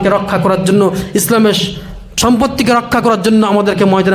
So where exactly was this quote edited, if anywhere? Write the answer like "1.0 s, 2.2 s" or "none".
2.0 s